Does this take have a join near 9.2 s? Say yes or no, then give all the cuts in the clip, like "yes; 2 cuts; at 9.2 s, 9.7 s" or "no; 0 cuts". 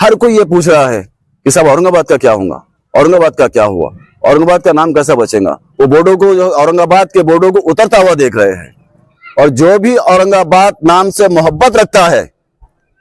yes; 1 cut; at 9.2 s